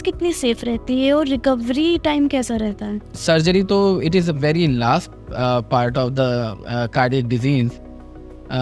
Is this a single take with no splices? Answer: yes; 0 cuts

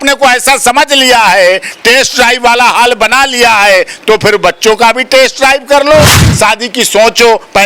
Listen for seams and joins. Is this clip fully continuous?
no; 1 cut; at 6.2 s

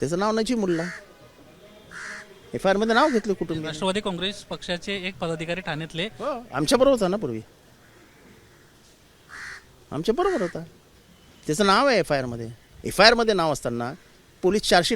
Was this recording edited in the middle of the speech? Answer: no; 0 cuts

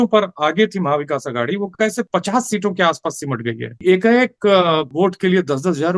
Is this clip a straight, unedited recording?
no; 3 cuts; at 2.1 s, 3.8 s, 4.9 s

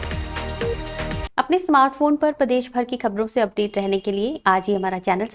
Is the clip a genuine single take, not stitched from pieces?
yes; 0 cuts

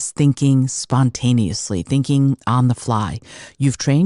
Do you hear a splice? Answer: no; 0 cuts

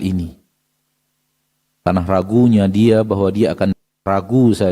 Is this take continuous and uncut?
no; 1 cut; at 3.7 s

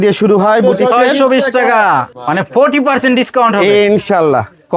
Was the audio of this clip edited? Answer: yes; 1 cut; at 2.1 s

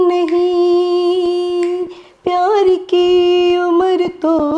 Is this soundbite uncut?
yes; 0 cuts

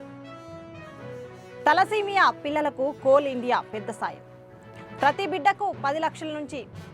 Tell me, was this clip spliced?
yes; 1 cut; at 1.2 s

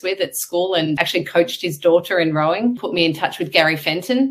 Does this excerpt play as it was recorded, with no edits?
no; 2 cuts; at 1.0 s, 2.8 s

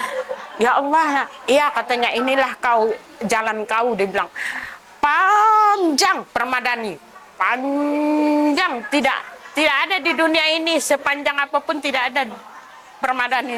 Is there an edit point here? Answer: no; 0 cuts

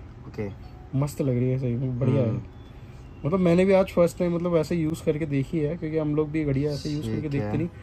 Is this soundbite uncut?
yes; 0 cuts

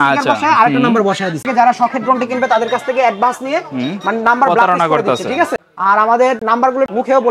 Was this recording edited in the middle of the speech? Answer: yes; 2 cuts; at 1.4 s, 5.5 s

